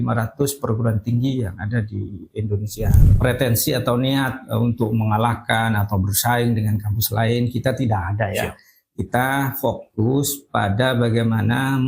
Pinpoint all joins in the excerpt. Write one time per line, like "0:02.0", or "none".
0:03.1